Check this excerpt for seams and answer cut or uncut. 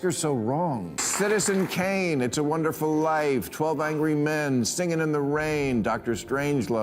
cut